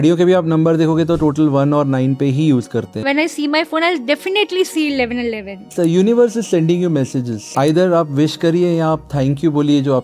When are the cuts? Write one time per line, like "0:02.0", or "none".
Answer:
0:02.9
0:05.7
0:07.4